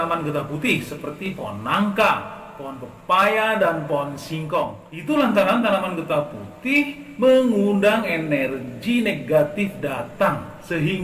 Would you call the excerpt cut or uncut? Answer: cut